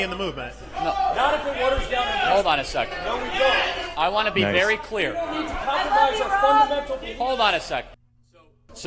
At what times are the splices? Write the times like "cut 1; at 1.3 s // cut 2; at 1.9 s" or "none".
none